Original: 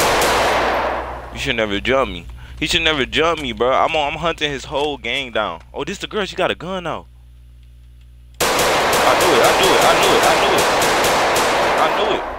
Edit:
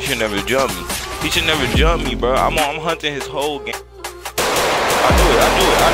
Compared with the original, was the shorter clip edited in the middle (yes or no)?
yes